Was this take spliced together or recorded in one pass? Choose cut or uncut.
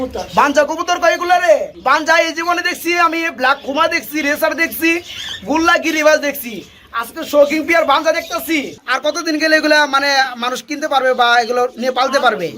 cut